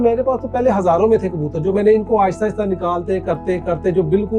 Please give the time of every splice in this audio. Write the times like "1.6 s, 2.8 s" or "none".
none